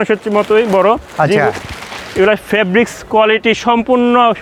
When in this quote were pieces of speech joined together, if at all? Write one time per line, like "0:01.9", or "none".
none